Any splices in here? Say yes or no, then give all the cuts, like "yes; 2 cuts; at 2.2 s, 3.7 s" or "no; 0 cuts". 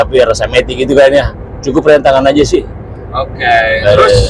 no; 0 cuts